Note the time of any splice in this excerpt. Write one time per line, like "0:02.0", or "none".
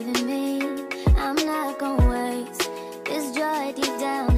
none